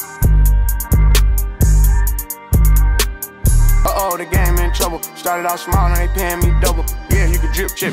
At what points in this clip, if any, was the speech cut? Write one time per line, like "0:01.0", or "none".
none